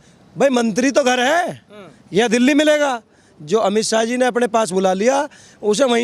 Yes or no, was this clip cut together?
no